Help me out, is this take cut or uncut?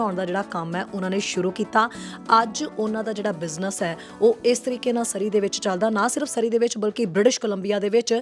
uncut